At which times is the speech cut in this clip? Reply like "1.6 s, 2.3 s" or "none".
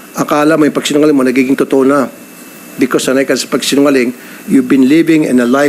none